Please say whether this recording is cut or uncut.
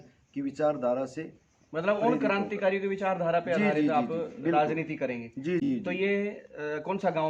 uncut